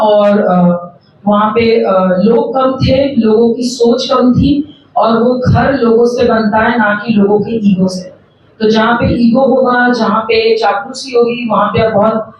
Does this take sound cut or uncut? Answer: uncut